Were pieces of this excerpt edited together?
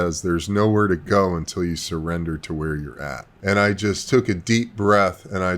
yes; 1 cut; at 3.3 s

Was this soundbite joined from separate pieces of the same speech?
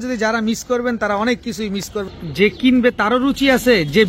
yes; 1 cut; at 2.1 s

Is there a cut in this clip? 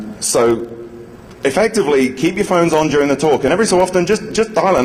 no; 0 cuts

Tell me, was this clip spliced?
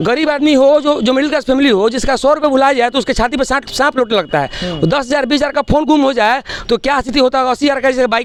no; 0 cuts

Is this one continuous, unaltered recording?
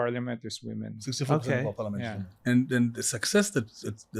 no; 1 cut; at 2.3 s

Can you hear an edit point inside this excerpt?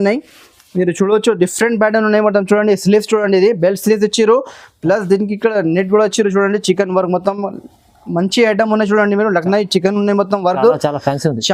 no; 0 cuts

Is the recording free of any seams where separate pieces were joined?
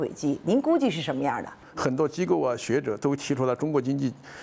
no; 1 cut; at 1.6 s

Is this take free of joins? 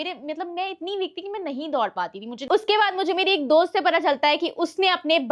no; 1 cut; at 2.4 s

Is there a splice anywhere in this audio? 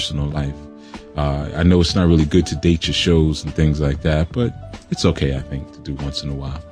yes; 1 cut; at 4.3 s

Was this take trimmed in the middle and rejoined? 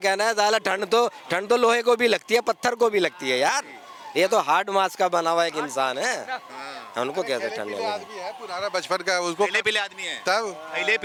no; 0 cuts

